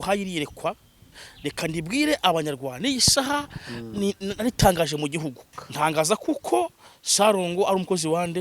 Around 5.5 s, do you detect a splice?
yes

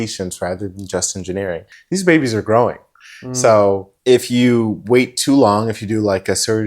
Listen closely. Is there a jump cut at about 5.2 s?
no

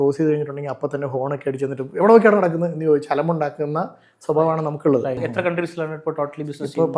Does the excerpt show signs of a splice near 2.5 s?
no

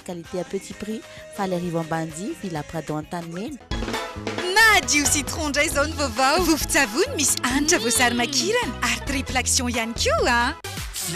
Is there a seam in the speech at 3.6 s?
yes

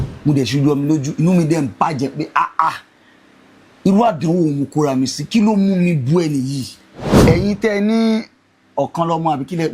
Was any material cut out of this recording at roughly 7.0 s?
yes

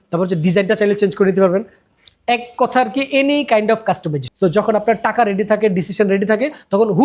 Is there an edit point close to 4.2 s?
yes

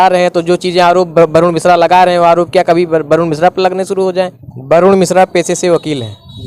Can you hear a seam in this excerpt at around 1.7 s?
no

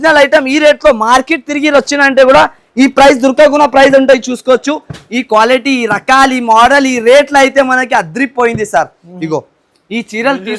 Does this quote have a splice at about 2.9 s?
no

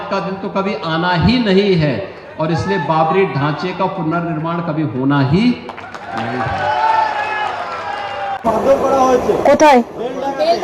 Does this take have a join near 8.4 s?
yes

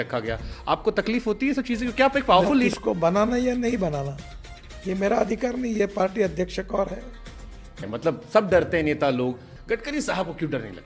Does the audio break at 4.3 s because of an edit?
no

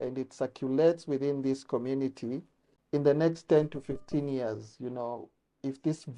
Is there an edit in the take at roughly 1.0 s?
no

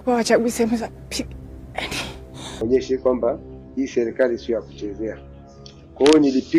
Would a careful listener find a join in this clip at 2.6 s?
yes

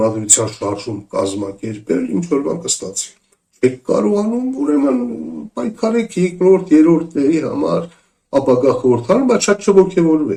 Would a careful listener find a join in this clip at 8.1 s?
no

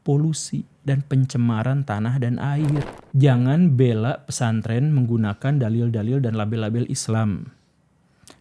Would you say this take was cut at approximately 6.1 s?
no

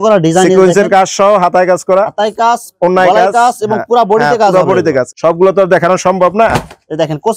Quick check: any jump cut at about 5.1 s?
yes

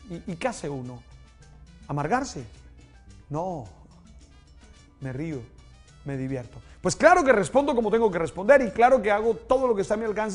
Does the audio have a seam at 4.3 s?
yes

